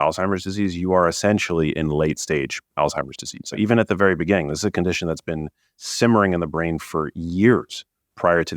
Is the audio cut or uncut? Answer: cut